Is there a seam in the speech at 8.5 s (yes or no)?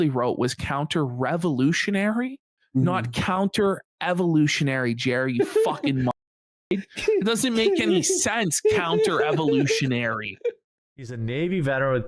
no